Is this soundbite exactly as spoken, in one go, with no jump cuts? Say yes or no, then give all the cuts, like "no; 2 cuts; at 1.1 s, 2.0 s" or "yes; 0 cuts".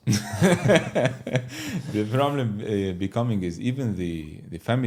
yes; 0 cuts